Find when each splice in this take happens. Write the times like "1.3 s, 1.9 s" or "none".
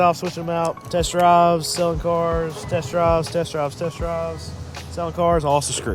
none